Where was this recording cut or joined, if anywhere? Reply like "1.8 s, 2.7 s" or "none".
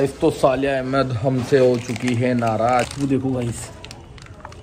2.9 s